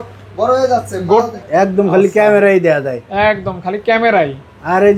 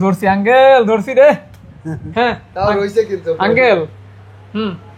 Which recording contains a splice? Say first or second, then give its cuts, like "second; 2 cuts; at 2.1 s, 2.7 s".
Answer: first; 1 cut; at 1.3 s